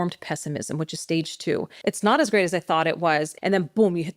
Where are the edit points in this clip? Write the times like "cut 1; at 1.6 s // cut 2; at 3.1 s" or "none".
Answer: cut 1; at 1.7 s // cut 2; at 3.3 s